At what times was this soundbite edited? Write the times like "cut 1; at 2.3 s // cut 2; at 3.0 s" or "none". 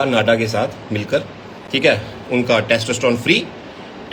none